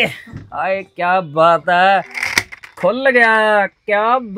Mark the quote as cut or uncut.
cut